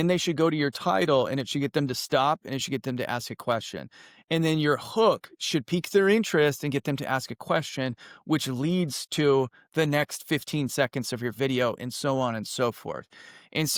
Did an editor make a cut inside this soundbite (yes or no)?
no